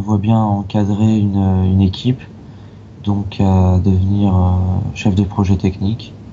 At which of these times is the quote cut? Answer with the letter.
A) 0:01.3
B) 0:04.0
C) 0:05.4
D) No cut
D